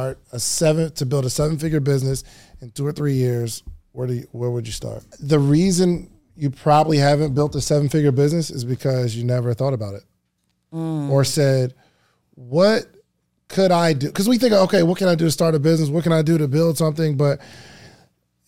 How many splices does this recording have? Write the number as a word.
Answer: one